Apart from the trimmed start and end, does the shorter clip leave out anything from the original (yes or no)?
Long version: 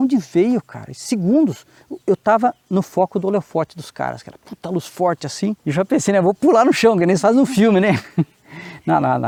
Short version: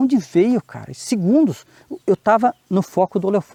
no